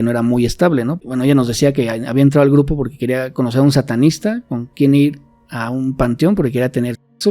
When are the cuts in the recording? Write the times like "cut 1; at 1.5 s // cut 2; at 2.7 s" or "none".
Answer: cut 1; at 1.0 s